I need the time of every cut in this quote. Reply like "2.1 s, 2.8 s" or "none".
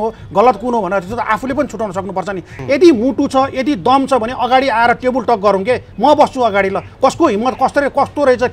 2.5 s